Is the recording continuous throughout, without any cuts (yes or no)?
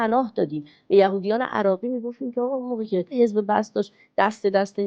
no